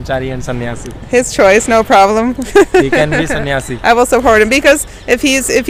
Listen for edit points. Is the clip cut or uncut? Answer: uncut